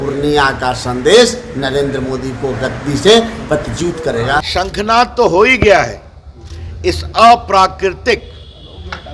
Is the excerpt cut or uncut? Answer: cut